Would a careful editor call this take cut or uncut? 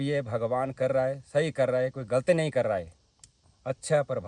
uncut